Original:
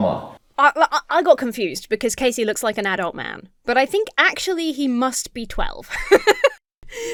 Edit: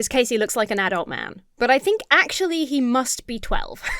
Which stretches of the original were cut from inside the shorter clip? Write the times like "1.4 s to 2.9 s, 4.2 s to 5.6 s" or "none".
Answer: none